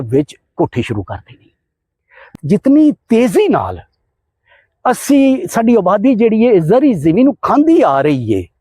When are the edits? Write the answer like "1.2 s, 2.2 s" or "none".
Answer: 2.3 s

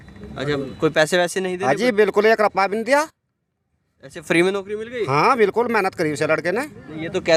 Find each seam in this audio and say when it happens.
none

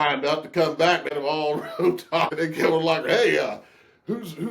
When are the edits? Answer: 1.1 s, 2.3 s

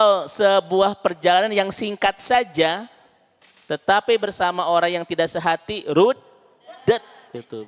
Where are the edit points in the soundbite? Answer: none

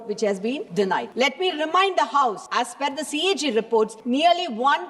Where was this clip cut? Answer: 0.8 s, 2.4 s, 4.0 s

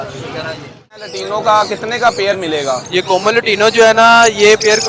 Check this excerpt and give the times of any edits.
1.0 s

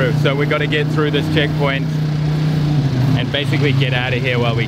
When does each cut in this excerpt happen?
none

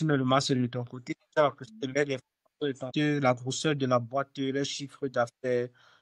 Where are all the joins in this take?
2.9 s

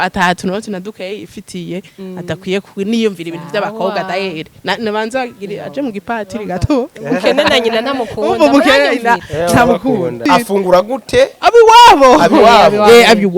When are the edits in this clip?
10.2 s

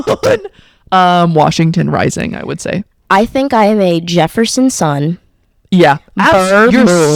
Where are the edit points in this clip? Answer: none

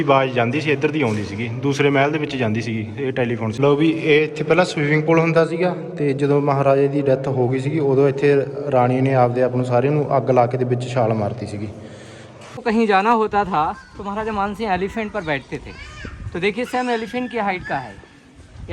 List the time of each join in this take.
3.5 s, 12.6 s

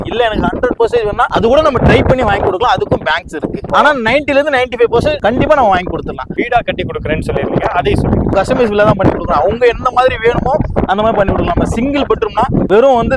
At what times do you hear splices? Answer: none

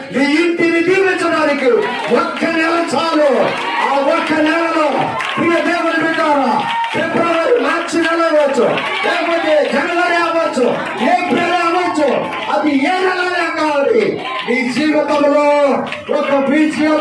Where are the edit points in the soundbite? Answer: none

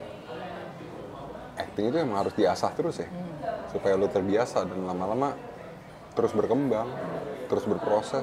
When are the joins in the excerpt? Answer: none

